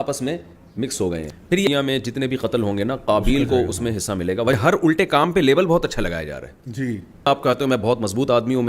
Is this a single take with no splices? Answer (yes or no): no